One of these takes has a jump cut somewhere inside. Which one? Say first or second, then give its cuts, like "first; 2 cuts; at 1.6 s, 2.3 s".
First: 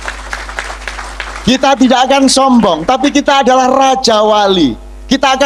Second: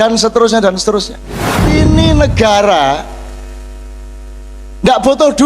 second; 1 cut; at 1.6 s